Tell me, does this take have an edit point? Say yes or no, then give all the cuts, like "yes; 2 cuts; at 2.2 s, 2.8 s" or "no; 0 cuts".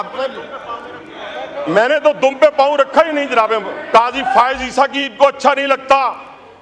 yes; 1 cut; at 3.8 s